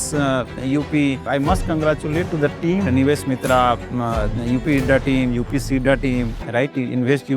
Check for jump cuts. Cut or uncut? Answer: cut